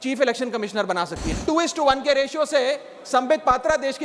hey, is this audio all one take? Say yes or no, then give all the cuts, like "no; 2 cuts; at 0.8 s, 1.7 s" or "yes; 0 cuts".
no; 1 cut; at 1.3 s